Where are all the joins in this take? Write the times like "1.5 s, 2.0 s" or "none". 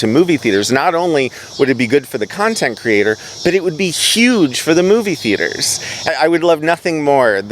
6.1 s